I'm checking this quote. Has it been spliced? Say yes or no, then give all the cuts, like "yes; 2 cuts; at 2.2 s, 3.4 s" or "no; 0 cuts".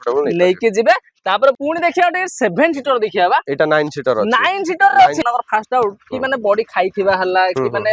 yes; 2 cuts; at 1.6 s, 5.2 s